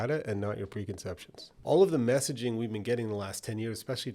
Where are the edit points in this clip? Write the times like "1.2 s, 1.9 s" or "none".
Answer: 1.5 s